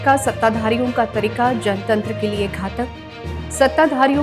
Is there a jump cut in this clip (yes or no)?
no